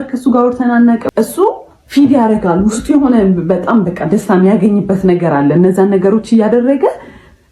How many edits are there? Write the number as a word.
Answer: one